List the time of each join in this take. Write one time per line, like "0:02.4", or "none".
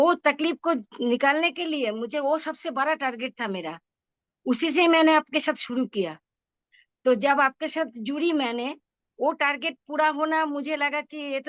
none